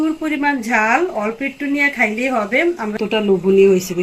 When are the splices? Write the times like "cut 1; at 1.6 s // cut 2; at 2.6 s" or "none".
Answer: cut 1; at 3.0 s